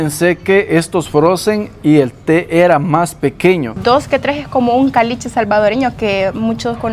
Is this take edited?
yes; 1 cut; at 3.8 s

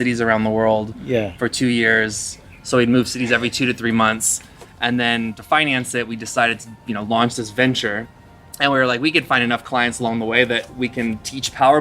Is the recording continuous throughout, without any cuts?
no; 1 cut; at 8.1 s

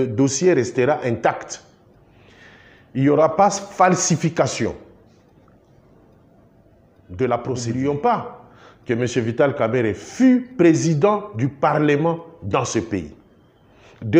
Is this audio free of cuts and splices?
no; 1 cut; at 7.6 s

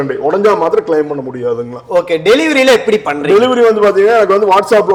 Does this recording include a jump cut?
no; 0 cuts

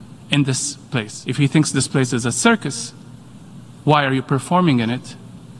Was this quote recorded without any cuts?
no; 1 cut; at 1.2 s

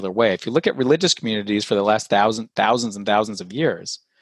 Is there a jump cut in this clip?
no; 0 cuts

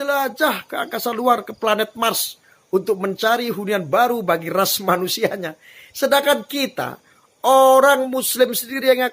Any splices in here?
no; 0 cuts

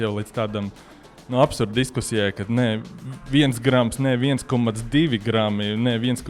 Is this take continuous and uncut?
yes; 0 cuts

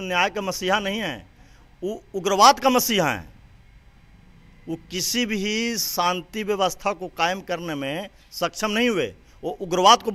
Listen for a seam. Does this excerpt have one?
no; 0 cuts

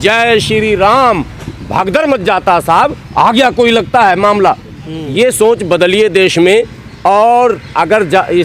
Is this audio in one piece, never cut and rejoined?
yes; 0 cuts

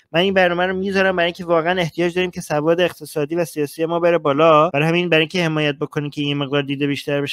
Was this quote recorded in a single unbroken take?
yes; 0 cuts

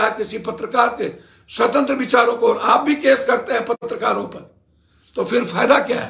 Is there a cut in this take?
no; 0 cuts

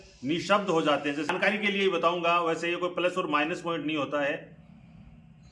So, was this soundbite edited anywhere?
yes; 1 cut; at 1.3 s

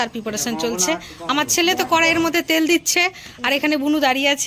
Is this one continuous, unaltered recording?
yes; 0 cuts

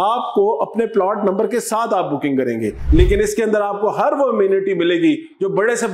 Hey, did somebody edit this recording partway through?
yes; 1 cut; at 2.9 s

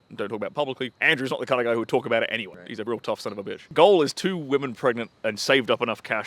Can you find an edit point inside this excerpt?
yes; 4 cuts; at 0.9 s, 2.6 s, 3.7 s, 5.2 s

